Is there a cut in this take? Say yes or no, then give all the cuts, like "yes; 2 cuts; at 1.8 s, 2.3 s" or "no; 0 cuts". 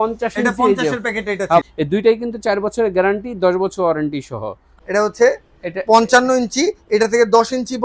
yes; 2 cuts; at 1.6 s, 4.7 s